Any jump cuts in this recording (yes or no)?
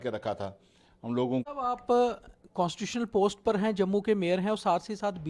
yes